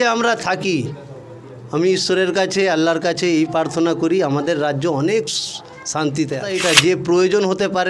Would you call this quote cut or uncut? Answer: cut